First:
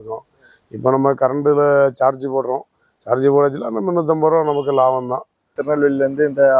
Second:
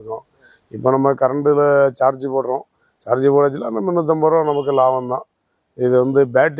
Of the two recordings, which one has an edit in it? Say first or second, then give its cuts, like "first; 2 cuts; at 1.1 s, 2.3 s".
first; 1 cut; at 5.5 s